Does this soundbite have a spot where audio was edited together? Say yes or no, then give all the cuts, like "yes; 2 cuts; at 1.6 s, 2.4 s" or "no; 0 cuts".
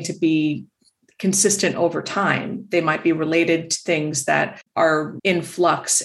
no; 0 cuts